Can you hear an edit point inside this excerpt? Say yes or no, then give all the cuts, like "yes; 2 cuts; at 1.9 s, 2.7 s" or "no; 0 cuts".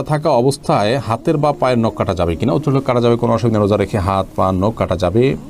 no; 0 cuts